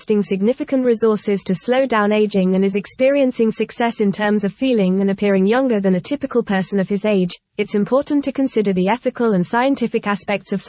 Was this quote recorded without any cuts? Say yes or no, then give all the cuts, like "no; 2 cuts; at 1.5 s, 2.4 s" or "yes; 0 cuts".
yes; 0 cuts